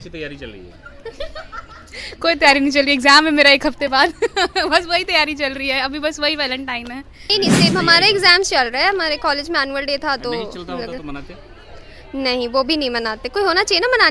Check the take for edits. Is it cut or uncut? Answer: cut